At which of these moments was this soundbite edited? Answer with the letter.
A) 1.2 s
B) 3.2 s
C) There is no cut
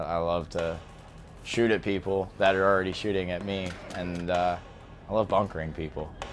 C